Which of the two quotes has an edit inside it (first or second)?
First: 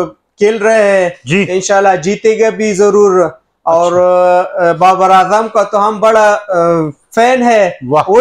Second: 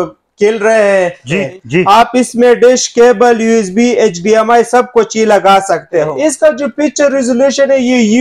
second